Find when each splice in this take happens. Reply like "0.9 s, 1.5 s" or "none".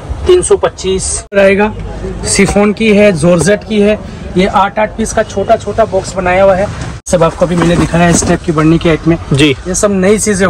1.4 s, 7.1 s